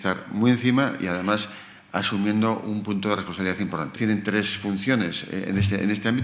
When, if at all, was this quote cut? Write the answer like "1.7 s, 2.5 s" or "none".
2.4 s